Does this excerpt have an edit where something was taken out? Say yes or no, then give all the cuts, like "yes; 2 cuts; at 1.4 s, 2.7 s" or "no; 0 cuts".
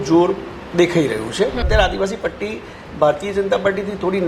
yes; 1 cut; at 1.7 s